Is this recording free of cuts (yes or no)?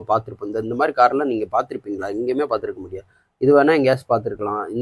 yes